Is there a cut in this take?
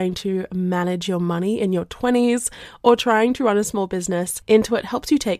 yes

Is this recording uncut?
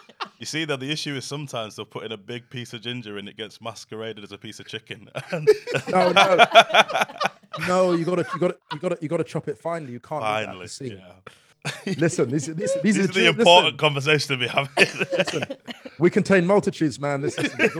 no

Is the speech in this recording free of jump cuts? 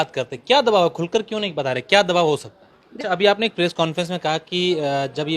no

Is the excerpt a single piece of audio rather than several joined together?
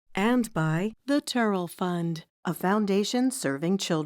no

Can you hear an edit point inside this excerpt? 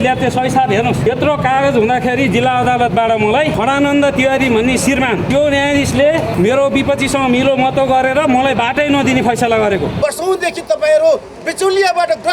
yes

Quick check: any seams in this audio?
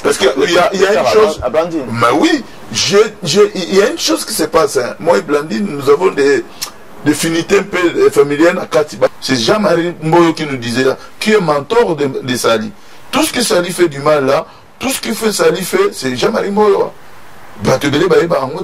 yes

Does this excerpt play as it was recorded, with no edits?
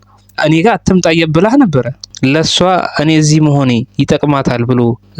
no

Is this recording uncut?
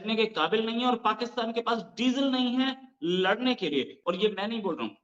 no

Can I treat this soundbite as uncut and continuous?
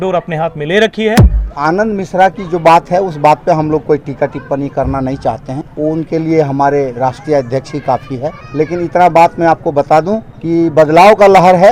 no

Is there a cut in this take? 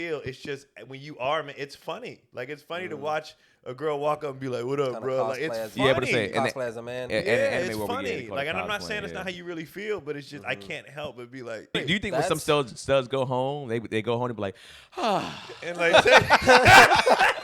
yes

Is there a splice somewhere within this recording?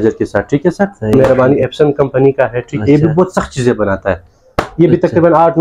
yes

